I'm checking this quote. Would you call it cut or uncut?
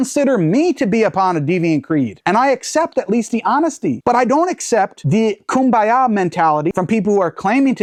uncut